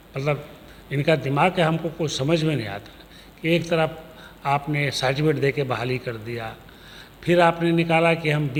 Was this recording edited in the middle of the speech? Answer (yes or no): no